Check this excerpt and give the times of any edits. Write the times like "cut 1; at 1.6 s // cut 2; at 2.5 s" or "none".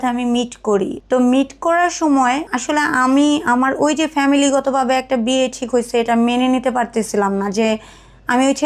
cut 1; at 1.0 s // cut 2; at 2.5 s